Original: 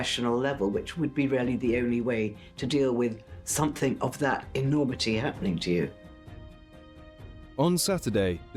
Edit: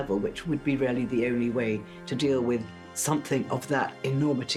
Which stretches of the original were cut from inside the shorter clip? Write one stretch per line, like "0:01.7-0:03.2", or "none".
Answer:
none